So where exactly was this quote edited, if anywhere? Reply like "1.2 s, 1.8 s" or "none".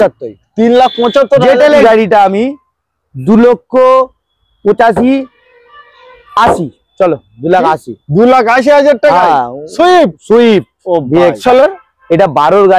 1.8 s, 11.4 s